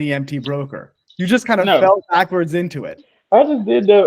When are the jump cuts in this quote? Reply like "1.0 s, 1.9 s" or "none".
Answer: 3.1 s